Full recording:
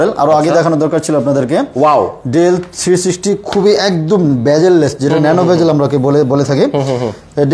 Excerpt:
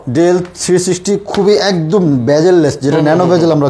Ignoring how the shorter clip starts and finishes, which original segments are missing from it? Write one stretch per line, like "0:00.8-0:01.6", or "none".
none